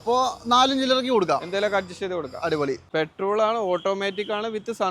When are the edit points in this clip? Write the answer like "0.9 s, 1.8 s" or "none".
2.8 s

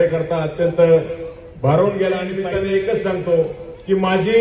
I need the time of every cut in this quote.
2.4 s

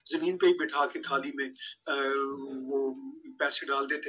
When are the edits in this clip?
none

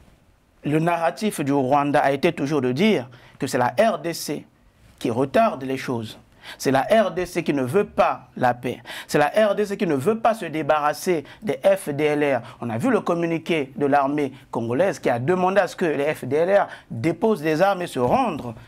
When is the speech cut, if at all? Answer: none

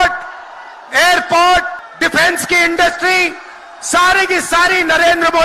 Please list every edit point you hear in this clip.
1.8 s

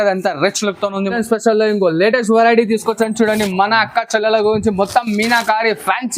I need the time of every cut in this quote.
1.2 s

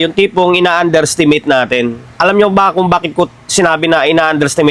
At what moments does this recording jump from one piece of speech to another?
2.0 s

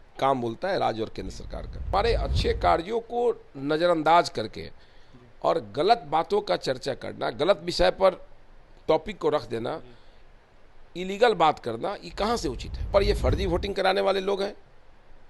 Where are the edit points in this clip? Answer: 1.9 s, 12.9 s

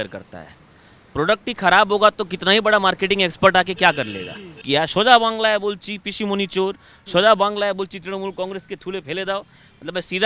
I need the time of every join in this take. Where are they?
4.6 s

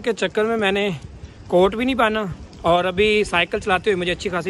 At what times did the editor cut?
none

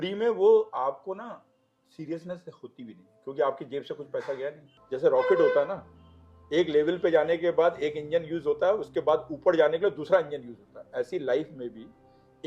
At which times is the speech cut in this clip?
4.7 s

